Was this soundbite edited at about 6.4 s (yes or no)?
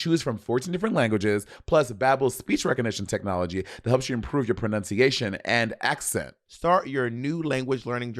yes